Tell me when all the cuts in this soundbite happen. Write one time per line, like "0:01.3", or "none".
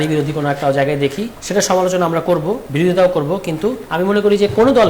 0:01.3
0:02.6
0:03.8